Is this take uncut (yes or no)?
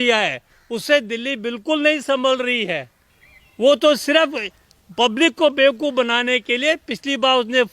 yes